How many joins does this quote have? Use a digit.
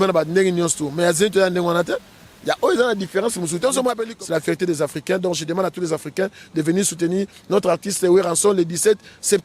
1